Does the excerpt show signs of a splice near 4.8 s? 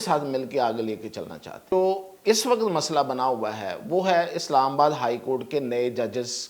no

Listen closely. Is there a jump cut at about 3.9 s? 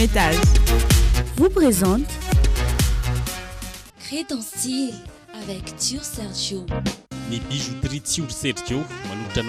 no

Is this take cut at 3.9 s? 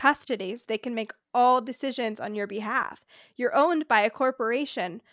no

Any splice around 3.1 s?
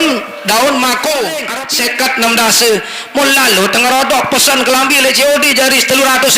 no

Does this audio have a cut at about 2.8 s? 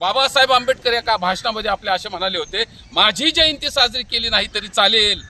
no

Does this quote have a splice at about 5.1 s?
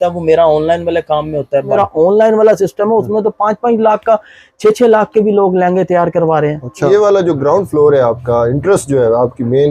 no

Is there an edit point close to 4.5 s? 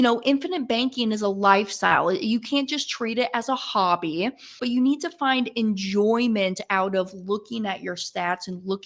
yes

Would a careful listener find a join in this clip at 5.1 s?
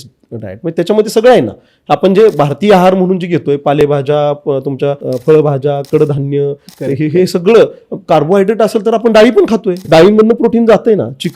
yes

